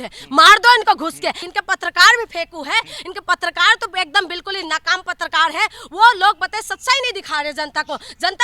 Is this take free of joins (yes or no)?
no